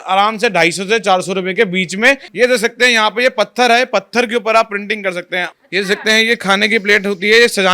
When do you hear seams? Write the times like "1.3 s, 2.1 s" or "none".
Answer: 2.3 s, 5.5 s